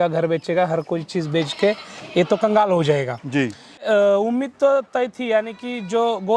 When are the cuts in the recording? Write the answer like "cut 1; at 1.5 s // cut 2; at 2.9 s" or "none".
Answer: cut 1; at 3.8 s